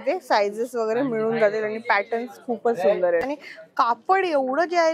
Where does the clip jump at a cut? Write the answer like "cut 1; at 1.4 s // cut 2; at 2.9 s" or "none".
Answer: cut 1; at 3.2 s